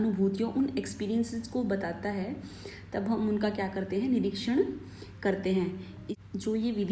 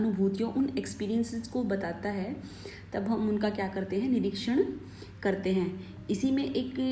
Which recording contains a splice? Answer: first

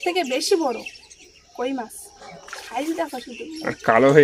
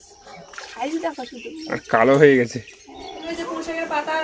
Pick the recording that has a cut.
second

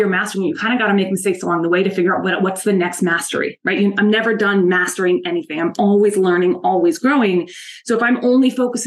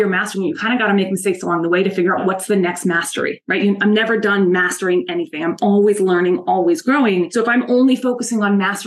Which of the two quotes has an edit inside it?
second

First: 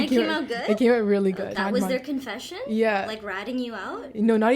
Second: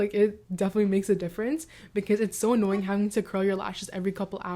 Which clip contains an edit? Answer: first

